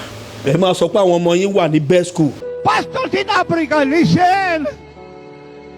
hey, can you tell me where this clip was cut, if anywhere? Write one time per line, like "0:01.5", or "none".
0:02.3